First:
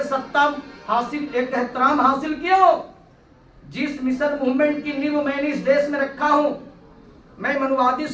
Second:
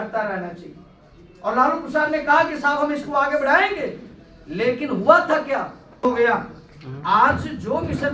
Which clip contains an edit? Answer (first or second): second